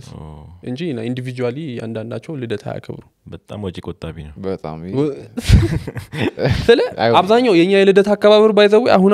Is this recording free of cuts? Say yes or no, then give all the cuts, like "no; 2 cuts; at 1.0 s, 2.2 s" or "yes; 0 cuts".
yes; 0 cuts